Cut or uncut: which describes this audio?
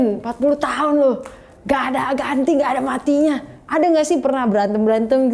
uncut